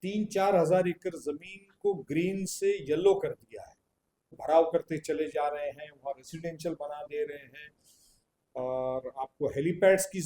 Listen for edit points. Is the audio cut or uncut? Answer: cut